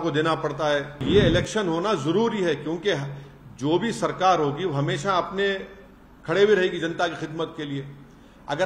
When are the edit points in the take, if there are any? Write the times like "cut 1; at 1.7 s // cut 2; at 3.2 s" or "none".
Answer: cut 1; at 1.0 s